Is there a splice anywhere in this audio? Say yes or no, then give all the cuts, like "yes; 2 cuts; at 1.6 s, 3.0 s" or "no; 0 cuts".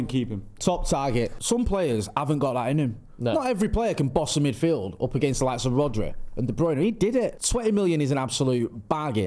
yes; 2 cuts; at 1.4 s, 7.4 s